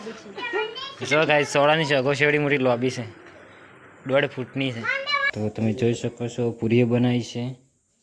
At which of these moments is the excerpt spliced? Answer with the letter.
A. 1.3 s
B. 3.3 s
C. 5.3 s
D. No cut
C